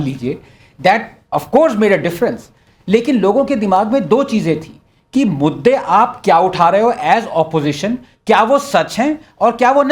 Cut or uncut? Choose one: uncut